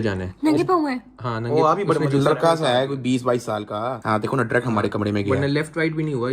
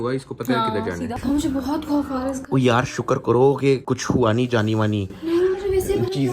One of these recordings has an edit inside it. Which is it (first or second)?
second